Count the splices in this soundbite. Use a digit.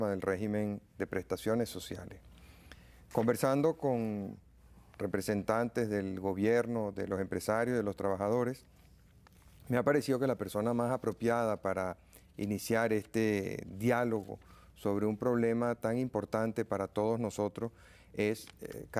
0